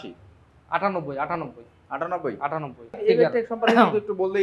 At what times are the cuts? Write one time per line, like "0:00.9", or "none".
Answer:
0:03.0

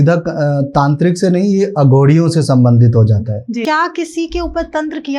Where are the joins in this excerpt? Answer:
0:03.6

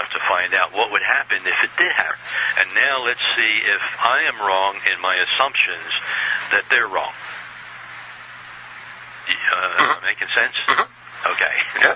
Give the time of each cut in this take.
none

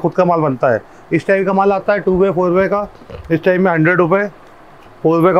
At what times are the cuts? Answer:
none

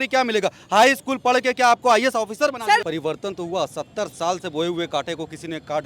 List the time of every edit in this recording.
0:02.8

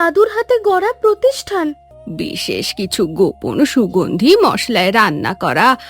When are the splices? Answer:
0:01.8

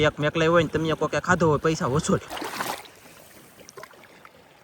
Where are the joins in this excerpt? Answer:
0:02.4

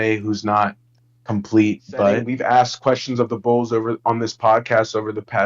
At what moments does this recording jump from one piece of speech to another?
0:02.3

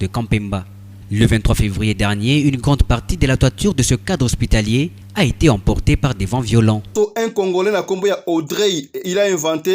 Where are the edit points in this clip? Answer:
0:06.9

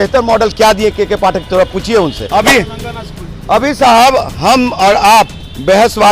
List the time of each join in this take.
0:02.2

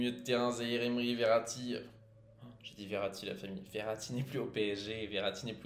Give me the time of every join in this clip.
none

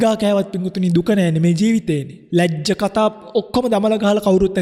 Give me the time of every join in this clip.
0:02.1

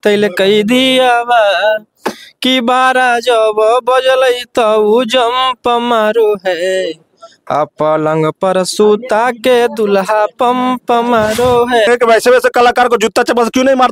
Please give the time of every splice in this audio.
0:11.9

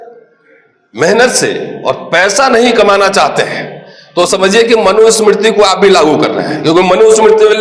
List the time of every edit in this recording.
none

